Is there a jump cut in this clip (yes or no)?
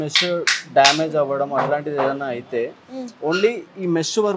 no